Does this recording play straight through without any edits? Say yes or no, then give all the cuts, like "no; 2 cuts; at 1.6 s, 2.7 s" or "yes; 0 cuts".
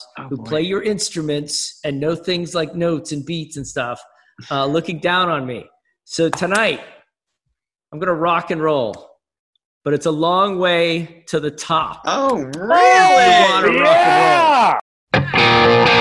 no; 1 cut; at 14.9 s